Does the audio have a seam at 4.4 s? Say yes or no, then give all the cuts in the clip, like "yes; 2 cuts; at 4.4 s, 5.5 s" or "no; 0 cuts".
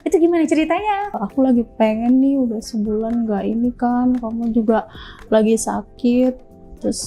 no; 1 cut; at 1.1 s